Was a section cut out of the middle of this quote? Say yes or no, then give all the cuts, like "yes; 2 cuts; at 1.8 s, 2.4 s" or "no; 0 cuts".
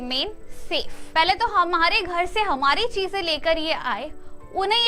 yes; 1 cut; at 1.0 s